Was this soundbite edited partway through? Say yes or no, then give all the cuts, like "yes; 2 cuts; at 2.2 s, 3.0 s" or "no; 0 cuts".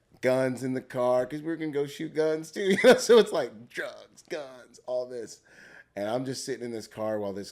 no; 0 cuts